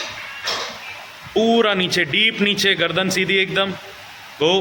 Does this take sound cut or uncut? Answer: uncut